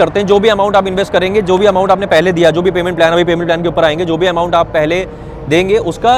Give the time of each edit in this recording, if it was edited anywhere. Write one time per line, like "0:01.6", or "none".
none